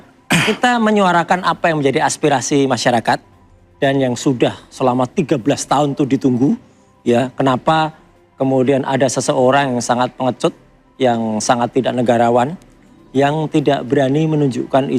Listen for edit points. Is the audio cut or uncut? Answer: uncut